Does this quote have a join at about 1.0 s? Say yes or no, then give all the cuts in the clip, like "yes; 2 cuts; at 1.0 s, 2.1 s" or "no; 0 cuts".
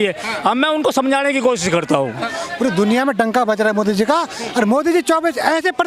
no; 1 cut; at 2.4 s